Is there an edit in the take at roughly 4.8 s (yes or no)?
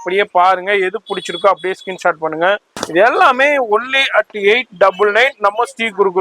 no